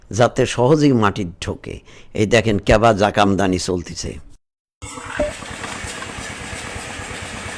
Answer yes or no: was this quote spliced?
no